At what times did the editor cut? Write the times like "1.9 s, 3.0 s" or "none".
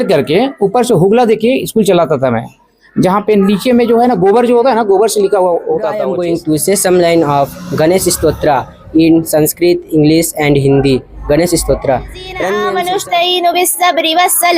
6.1 s, 12.7 s